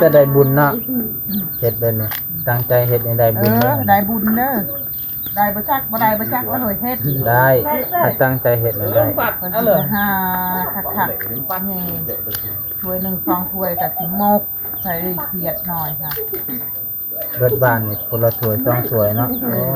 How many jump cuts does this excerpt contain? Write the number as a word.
zero